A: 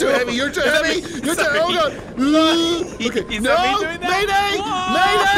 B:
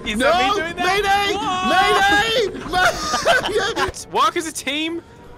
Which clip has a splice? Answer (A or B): B